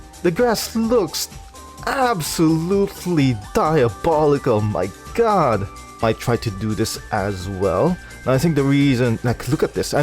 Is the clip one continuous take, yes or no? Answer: no